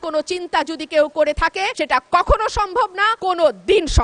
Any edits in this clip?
no; 0 cuts

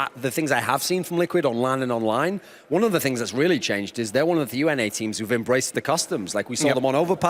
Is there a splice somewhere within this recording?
yes; 1 cut; at 5.0 s

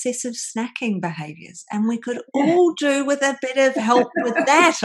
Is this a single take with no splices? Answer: yes; 0 cuts

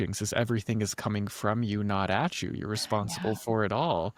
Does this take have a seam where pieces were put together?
no; 0 cuts

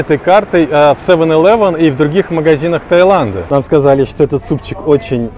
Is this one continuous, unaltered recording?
no; 1 cut; at 3.4 s

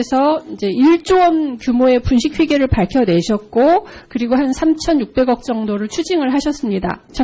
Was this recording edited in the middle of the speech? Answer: yes; 1 cut; at 1.5 s

